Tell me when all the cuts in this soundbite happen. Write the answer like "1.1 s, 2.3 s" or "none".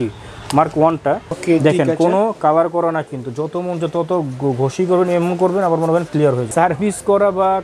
1.3 s, 6.4 s